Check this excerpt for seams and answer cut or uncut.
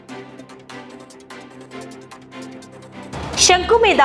uncut